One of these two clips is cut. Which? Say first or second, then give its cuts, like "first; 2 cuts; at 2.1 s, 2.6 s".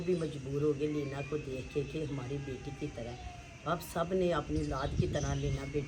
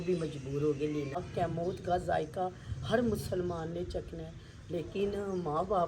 second; 1 cut; at 1.2 s